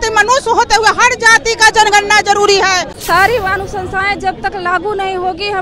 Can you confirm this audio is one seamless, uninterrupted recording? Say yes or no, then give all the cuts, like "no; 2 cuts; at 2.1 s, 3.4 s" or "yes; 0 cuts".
no; 1 cut; at 2.9 s